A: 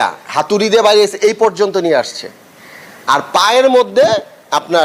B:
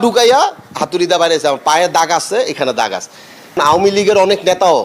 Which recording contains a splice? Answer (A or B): B